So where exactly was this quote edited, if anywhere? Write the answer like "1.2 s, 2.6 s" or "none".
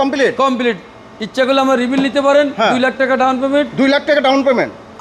none